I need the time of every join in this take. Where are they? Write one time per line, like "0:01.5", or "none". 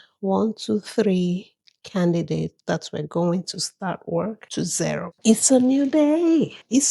0:05.1